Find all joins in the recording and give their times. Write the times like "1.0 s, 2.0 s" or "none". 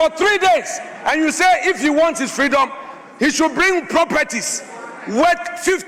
none